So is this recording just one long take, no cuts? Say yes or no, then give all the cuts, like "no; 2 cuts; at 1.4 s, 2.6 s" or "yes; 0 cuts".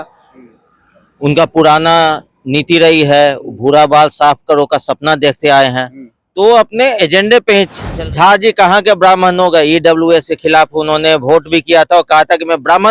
no; 1 cut; at 7.8 s